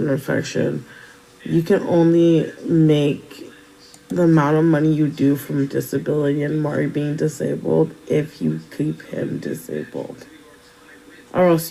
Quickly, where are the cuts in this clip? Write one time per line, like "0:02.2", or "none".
0:02.9

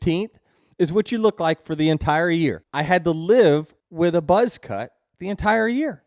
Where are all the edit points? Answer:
0:02.7
0:03.8

